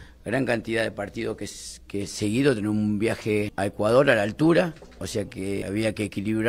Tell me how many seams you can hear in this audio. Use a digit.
2